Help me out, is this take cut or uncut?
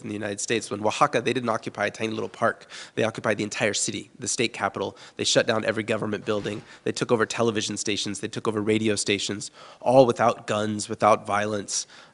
uncut